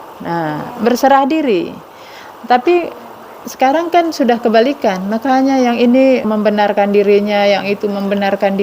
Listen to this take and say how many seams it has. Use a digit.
1